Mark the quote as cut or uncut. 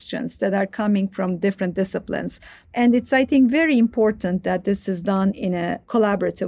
cut